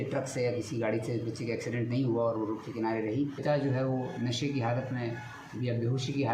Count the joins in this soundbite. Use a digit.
1